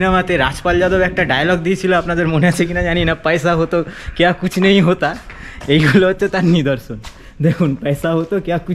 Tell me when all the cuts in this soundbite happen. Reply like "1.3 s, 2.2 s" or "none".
none